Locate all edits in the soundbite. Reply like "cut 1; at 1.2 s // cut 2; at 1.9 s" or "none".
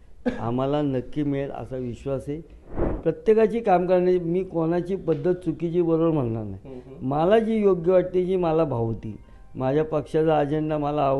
cut 1; at 2.8 s